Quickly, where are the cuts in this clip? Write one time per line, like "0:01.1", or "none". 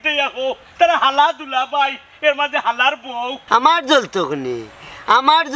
0:03.4